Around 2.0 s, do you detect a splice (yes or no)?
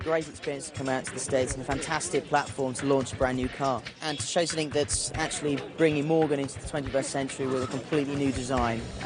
no